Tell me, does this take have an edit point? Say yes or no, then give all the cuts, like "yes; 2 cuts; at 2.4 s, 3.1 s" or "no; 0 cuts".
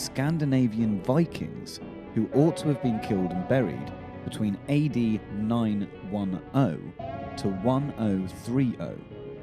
yes; 1 cut; at 7.3 s